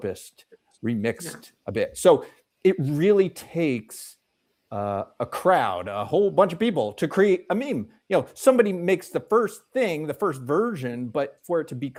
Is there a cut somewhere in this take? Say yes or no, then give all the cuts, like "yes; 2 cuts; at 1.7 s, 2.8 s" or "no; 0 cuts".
no; 0 cuts